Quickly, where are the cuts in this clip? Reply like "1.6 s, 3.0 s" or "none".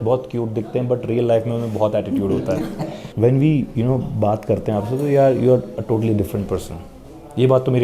3.0 s